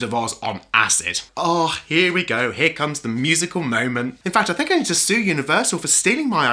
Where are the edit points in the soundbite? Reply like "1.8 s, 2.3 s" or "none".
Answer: 1.2 s, 4.2 s